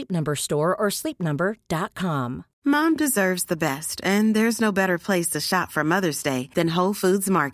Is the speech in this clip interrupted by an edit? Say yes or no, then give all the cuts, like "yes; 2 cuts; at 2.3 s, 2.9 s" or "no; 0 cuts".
yes; 1 cut; at 2.4 s